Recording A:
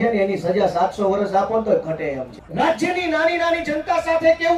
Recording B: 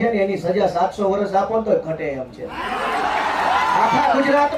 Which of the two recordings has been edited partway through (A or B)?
A